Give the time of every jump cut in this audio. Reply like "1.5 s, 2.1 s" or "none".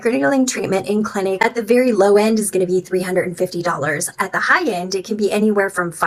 none